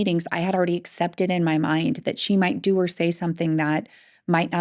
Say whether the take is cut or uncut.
uncut